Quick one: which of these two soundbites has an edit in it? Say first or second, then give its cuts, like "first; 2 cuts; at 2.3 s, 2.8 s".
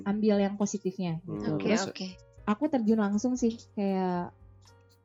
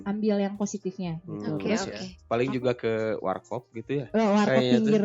second; 1 cut; at 2.1 s